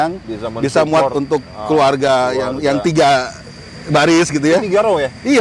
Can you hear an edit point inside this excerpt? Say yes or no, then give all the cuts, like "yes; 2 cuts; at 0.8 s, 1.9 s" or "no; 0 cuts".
no; 0 cuts